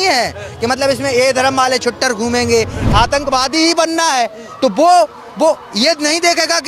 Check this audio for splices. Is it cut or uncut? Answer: cut